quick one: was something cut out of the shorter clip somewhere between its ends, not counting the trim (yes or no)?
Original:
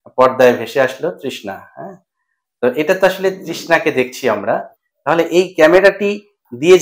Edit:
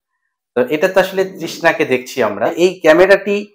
yes